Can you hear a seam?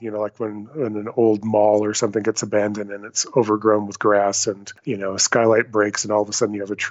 yes; 1 cut; at 4.7 s

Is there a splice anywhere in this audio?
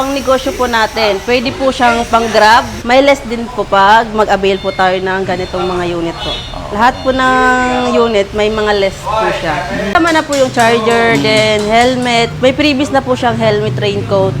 yes; 2 cuts; at 2.7 s, 9.9 s

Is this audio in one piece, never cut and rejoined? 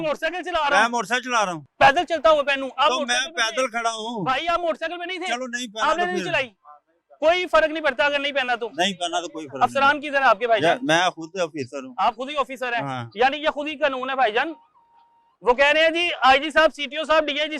yes; 0 cuts

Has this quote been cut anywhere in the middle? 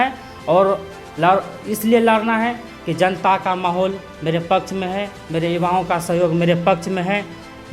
no; 0 cuts

